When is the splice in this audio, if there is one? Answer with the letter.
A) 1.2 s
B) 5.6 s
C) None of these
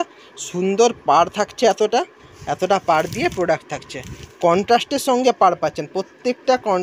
C